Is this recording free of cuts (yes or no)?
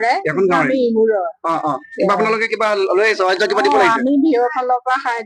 yes